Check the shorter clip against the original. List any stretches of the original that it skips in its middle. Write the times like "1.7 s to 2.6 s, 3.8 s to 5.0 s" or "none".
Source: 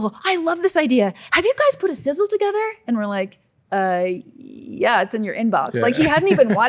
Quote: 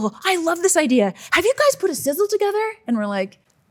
none

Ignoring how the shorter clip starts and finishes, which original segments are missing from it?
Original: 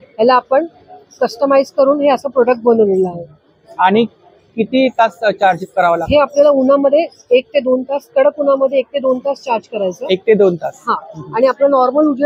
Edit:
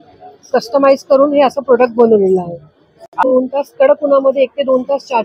3.8 s to 7.4 s

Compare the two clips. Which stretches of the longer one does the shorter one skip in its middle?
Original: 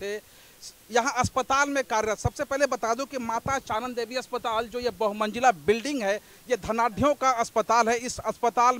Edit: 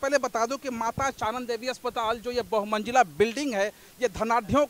none

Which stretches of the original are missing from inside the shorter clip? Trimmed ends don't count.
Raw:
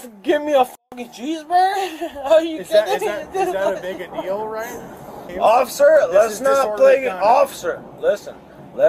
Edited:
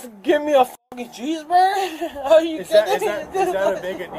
none

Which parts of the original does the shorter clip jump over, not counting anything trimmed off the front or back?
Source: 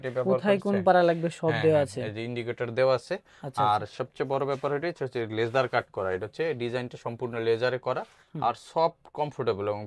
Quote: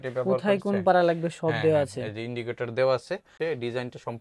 3.3 s to 6.3 s

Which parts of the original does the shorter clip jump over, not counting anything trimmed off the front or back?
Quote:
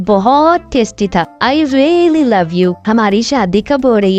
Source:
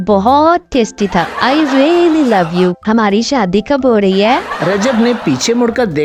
none

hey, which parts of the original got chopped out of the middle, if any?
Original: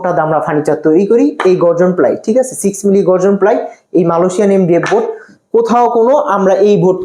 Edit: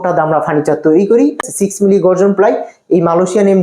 1.4 s to 2.4 s

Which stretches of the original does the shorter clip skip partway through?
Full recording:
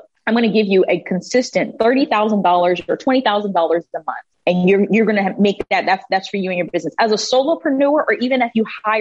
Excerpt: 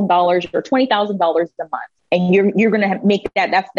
none

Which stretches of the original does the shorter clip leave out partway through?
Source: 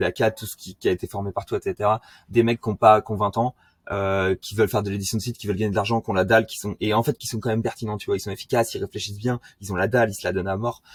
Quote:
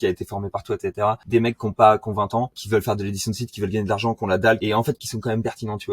2.0 s to 2.3 s, 3.6 s to 4.5 s, 6.5 s to 6.8 s

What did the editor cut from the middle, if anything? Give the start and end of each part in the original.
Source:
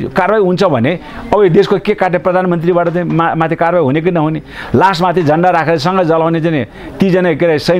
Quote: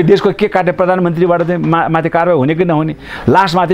none

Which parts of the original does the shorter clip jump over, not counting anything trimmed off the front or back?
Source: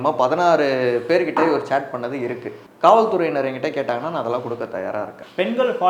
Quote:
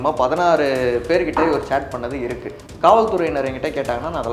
none

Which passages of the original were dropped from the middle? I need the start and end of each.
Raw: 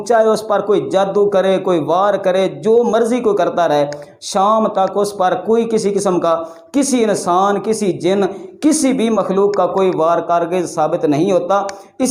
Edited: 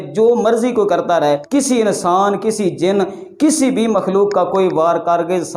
3.9 s to 6.7 s

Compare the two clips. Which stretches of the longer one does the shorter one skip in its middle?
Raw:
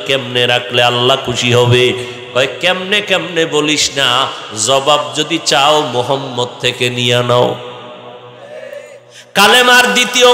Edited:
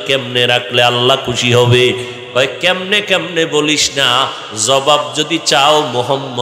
none

